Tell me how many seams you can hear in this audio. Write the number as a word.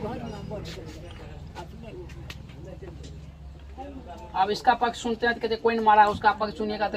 zero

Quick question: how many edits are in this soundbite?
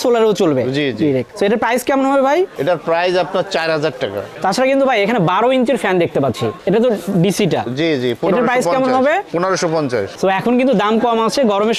zero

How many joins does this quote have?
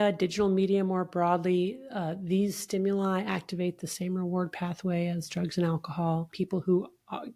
one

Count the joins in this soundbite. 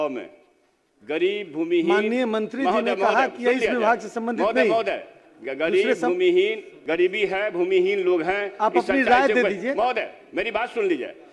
one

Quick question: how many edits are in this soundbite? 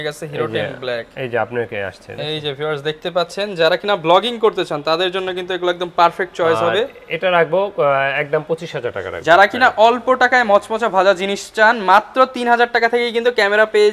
zero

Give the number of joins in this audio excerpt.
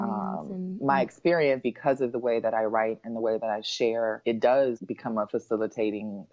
three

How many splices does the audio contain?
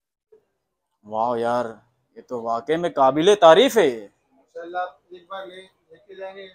zero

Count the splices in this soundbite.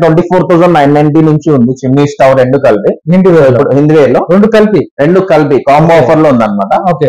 zero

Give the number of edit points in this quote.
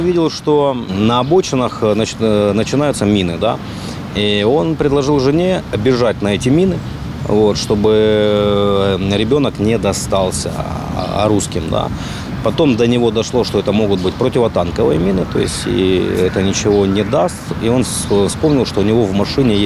one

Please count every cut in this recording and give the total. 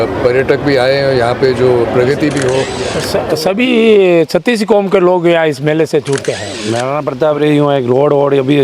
two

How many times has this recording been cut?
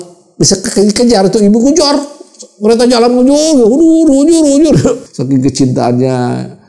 one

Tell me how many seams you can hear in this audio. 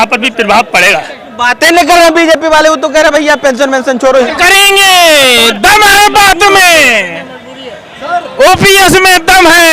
two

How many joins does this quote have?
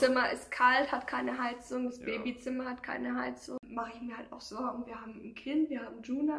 one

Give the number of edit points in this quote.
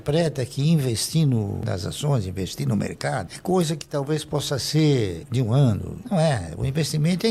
zero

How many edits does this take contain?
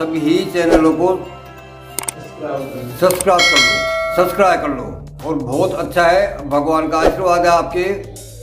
one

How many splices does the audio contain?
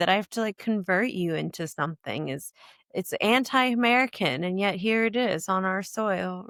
zero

